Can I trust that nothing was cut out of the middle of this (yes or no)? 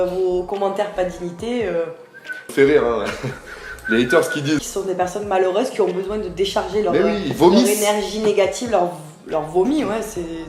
no